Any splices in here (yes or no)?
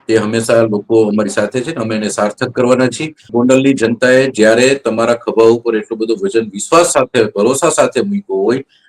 yes